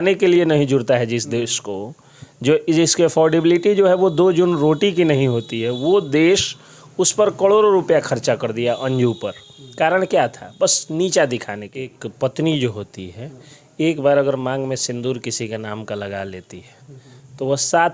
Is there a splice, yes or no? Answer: yes